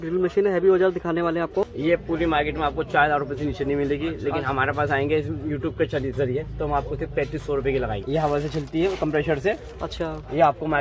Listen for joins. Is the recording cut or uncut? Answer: cut